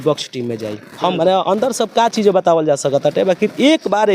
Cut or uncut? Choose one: cut